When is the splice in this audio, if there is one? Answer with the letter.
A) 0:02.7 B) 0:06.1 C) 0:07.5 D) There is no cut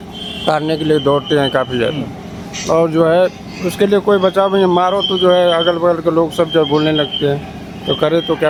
D